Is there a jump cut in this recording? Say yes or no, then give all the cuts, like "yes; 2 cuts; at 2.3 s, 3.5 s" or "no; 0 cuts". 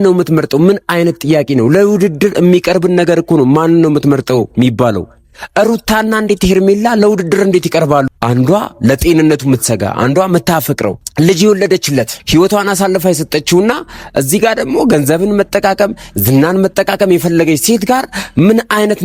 yes; 3 cuts; at 8.1 s, 11.0 s, 12.2 s